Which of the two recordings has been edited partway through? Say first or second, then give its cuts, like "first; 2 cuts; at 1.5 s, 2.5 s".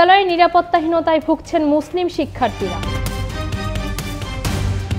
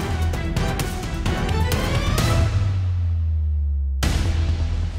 first; 1 cut; at 2.8 s